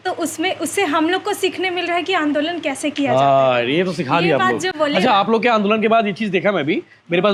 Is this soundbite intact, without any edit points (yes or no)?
yes